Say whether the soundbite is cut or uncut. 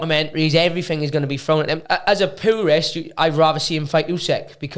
cut